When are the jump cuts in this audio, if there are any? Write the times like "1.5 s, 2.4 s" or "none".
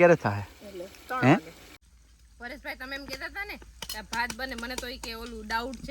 1.8 s